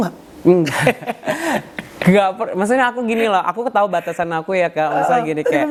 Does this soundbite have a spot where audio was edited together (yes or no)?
no